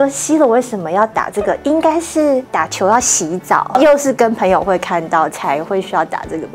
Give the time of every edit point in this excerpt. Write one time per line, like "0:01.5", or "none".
0:02.5
0:03.7